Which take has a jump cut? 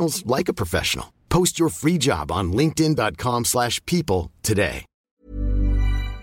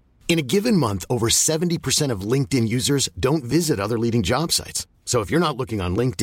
first; 1 cut; at 4.9 s

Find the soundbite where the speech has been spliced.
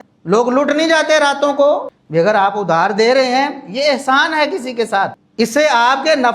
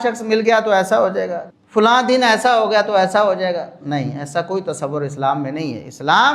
first; 2 cuts; at 1.9 s, 5.2 s

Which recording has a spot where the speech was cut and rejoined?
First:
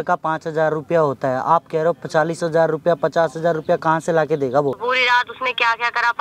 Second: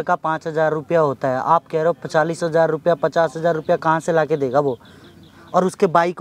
first; 1 cut; at 4.8 s

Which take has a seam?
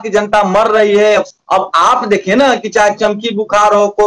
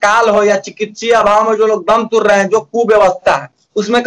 first; 1 cut; at 1.3 s

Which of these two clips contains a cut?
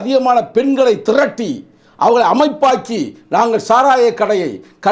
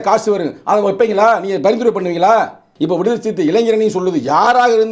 second; 1 cut; at 2.7 s

